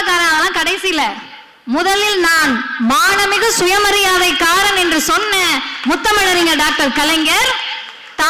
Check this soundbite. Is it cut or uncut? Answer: uncut